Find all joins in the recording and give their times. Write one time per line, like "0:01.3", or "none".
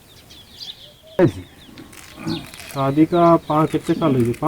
0:01.2